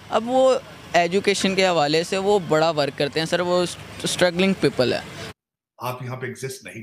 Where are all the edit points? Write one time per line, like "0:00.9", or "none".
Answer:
0:05.2